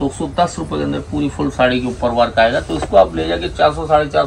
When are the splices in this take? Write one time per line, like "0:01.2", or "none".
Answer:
none